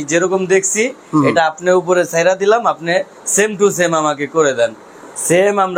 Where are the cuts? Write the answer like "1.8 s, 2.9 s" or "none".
none